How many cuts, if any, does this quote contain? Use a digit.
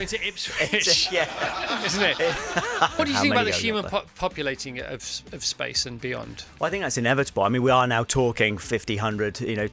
1